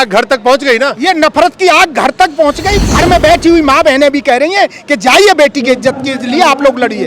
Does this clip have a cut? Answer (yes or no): yes